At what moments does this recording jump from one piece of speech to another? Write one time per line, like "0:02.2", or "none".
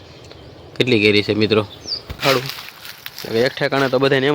0:02.2